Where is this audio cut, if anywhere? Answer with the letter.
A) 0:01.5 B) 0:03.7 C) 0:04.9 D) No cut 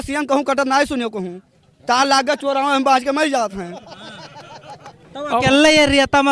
C